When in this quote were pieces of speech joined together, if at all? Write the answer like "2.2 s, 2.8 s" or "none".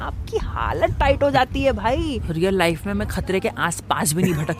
2.2 s